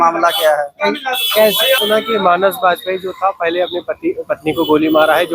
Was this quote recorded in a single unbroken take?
no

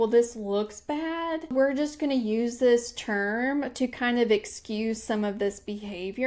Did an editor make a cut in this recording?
yes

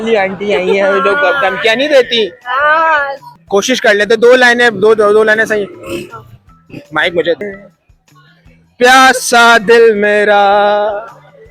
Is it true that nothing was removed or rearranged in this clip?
no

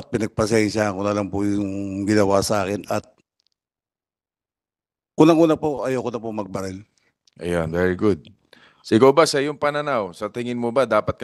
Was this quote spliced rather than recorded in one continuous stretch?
no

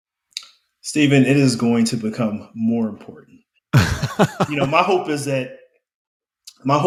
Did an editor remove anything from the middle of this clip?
no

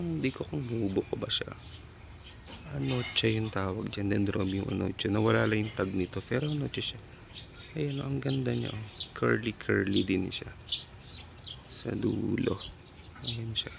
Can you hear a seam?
no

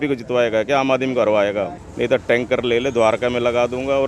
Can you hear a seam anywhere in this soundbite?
yes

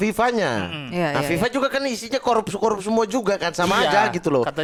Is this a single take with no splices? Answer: yes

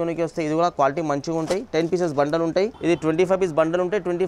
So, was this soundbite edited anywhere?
yes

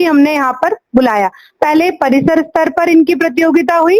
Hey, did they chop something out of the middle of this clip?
no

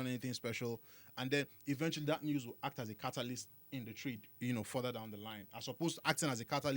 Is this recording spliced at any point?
no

